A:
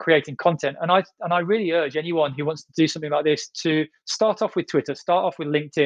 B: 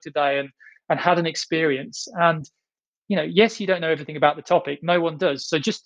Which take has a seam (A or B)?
B